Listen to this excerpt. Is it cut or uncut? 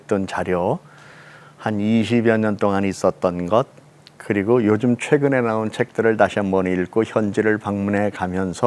uncut